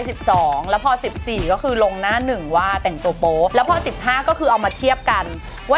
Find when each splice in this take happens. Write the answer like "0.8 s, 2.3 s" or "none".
none